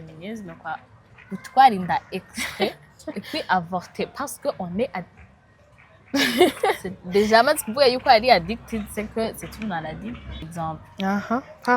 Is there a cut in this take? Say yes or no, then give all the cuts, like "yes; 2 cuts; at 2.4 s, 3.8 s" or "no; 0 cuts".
yes; 1 cut; at 10.5 s